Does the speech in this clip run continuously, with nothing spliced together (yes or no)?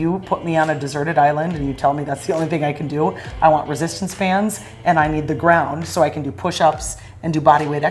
yes